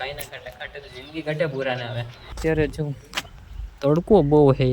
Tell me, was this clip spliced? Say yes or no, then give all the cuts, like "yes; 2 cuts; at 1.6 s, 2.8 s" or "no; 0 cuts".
yes; 1 cut; at 2.3 s